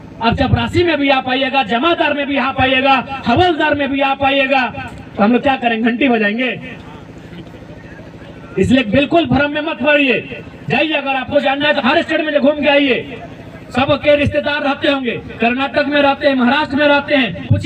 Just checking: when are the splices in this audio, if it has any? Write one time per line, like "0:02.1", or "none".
none